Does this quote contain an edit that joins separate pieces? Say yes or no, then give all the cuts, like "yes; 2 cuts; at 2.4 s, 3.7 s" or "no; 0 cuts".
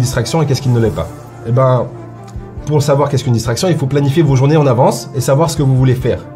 no; 0 cuts